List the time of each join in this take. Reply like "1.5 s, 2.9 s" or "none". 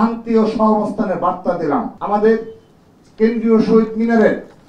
2.0 s

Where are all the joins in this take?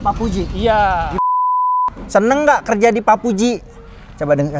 1.4 s

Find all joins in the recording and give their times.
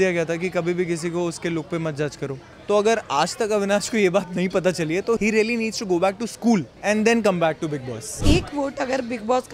2.5 s, 5.2 s, 6.7 s, 8.1 s

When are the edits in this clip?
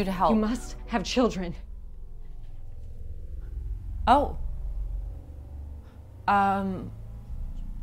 none

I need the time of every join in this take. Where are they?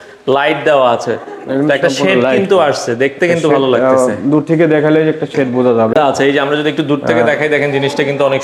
none

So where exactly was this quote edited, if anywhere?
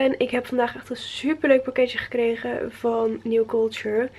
none

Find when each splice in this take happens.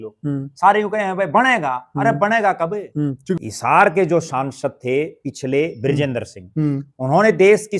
3.4 s

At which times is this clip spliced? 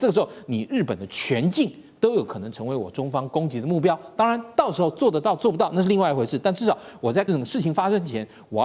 7.3 s

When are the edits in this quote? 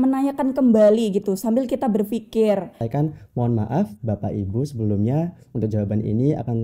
2.8 s

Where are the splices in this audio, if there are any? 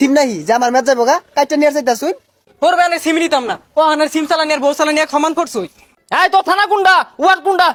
none

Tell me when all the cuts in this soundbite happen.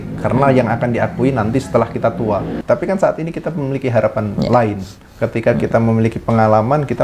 2.6 s

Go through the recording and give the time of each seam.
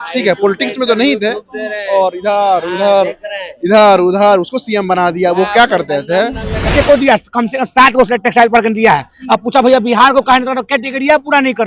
6.7 s

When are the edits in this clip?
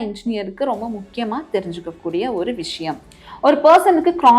3.0 s

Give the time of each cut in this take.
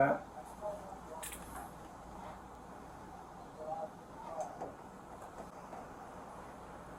5.5 s

